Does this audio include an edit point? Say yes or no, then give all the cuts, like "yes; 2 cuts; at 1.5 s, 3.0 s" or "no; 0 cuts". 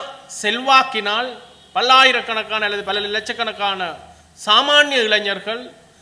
no; 0 cuts